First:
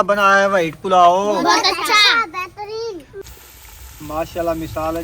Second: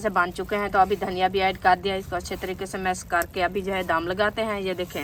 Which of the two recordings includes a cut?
first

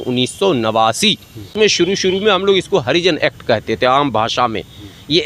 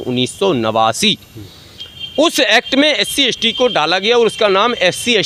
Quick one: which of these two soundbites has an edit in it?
first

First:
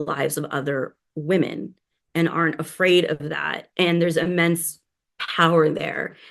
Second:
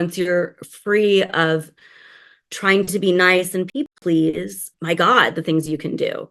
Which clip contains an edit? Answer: second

